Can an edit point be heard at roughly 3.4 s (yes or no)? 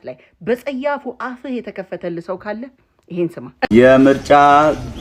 yes